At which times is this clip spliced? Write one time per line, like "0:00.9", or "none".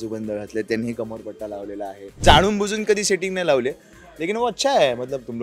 0:02.2